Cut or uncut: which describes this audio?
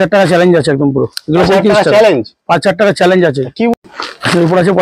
cut